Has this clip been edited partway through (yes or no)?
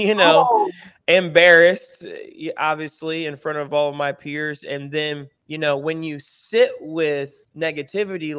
yes